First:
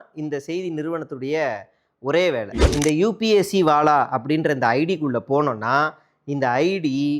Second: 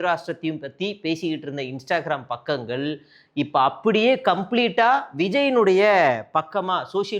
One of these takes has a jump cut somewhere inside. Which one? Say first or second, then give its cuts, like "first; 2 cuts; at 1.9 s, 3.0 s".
first; 1 cut; at 2.6 s